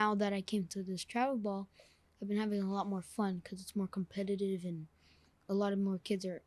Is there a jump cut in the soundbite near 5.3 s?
no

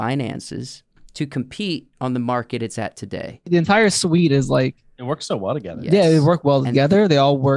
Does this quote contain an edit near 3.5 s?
yes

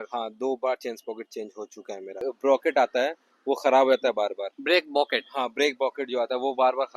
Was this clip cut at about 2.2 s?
yes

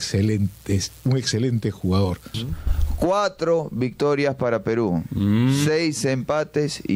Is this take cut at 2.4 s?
yes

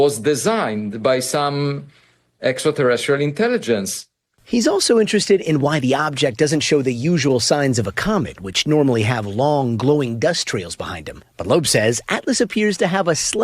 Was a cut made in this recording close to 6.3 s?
no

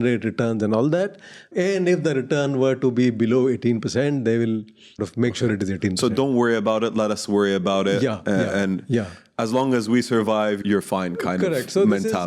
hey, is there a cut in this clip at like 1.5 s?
yes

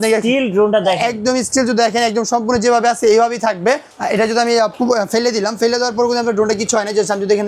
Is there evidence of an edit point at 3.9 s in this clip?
yes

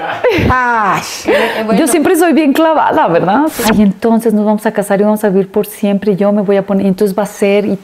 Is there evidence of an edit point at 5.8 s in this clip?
no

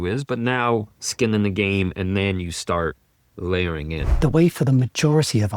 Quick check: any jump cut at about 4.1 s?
yes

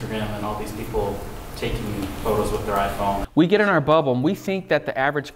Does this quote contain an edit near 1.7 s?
no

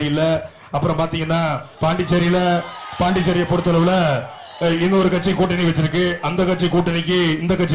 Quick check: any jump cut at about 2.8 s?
yes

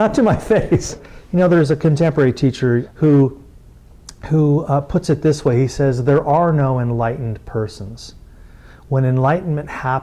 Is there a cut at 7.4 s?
no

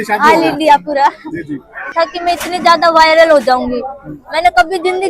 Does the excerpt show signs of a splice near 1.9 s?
yes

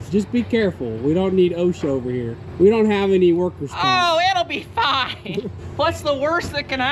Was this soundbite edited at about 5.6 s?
yes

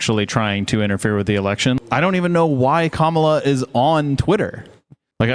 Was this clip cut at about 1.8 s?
yes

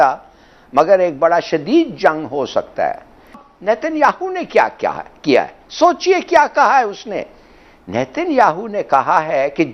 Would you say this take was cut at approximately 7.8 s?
no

